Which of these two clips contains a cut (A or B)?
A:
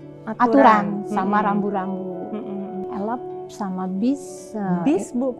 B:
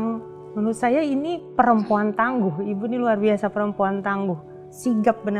A